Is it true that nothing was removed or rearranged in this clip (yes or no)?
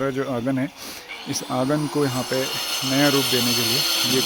yes